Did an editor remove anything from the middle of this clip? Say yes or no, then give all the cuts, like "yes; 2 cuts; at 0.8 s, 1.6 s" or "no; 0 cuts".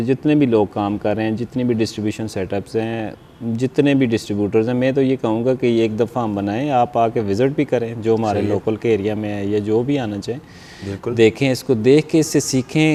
no; 0 cuts